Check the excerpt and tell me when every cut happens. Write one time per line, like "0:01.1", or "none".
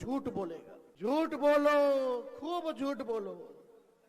0:01.1